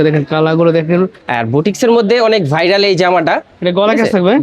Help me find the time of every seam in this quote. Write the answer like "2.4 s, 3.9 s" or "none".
1.2 s, 3.5 s